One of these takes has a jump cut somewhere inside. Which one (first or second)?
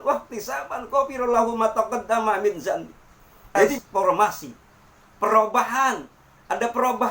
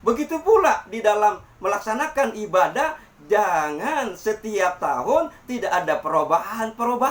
first